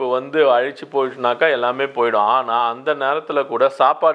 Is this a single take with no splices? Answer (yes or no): yes